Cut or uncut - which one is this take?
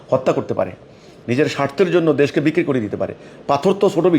uncut